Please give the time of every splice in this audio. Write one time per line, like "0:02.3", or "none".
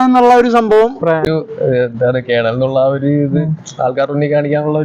0:01.2